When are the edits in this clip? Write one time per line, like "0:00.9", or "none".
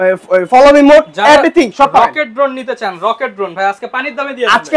none